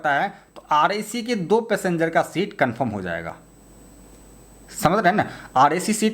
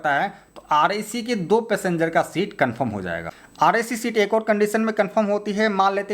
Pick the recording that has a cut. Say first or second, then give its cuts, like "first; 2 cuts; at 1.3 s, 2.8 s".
second; 1 cut; at 3.4 s